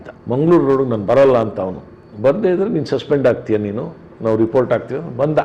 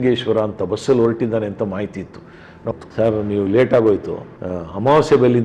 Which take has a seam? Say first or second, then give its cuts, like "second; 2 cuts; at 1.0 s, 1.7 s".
second; 1 cut; at 2.7 s